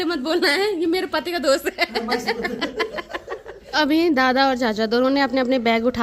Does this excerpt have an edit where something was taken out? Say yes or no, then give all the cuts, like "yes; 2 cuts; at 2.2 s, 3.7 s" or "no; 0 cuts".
no; 0 cuts